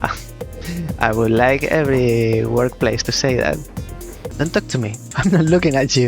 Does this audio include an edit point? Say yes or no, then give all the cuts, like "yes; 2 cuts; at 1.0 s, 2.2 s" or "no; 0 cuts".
yes; 2 cuts; at 4.2 s, 5.1 s